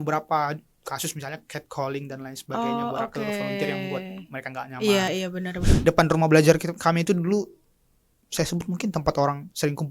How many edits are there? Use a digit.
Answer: 1